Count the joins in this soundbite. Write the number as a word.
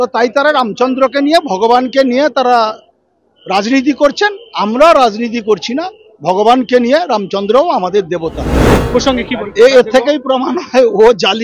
one